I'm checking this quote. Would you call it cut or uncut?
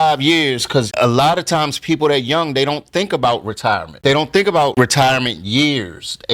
cut